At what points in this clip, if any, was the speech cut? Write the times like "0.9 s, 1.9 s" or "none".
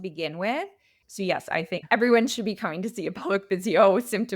0.9 s